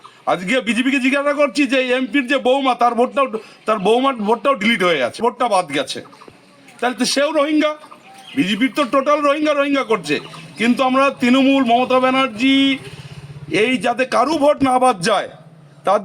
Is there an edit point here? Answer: yes; 1 cut; at 5.2 s

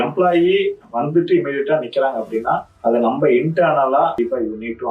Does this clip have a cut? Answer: yes; 2 cuts; at 2.7 s, 4.1 s

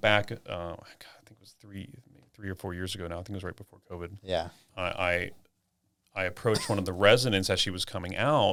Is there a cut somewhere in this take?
no; 0 cuts

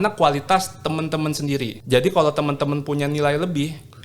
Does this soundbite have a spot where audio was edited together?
yes; 1 cut; at 1.7 s

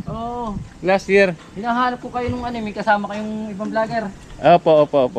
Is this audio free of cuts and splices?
yes; 0 cuts

